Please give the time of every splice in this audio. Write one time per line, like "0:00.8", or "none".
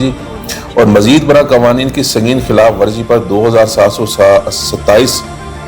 none